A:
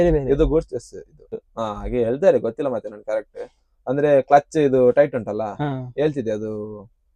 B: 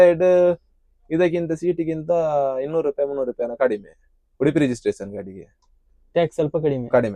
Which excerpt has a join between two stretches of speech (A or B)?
A